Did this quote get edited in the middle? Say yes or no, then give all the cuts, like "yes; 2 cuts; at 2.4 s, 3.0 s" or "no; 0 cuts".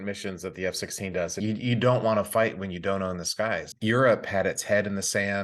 yes; 2 cuts; at 1.3 s, 3.7 s